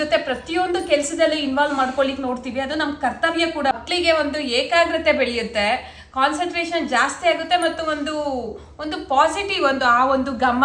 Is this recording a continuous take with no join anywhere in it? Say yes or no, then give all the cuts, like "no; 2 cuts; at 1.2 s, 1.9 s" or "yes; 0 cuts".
no; 1 cut; at 3.8 s